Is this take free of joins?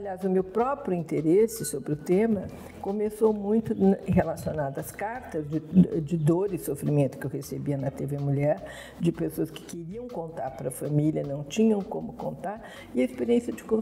yes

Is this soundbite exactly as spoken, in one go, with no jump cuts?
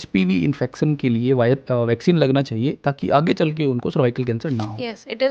yes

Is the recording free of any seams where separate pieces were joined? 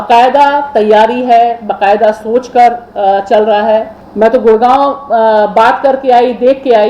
no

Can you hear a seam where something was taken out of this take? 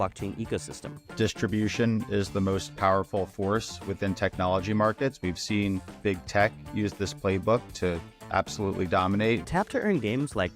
yes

